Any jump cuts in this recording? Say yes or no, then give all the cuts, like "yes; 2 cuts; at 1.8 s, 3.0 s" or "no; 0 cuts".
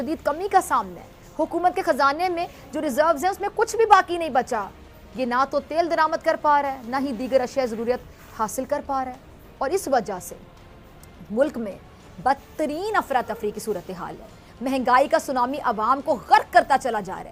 no; 0 cuts